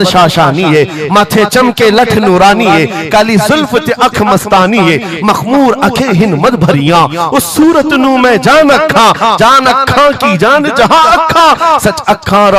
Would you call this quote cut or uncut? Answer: uncut